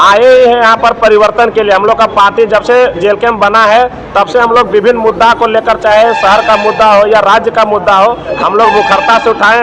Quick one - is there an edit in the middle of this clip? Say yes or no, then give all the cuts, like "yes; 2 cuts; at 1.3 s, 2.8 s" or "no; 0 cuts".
no; 0 cuts